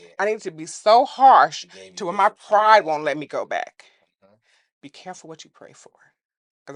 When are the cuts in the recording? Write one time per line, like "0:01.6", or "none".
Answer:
none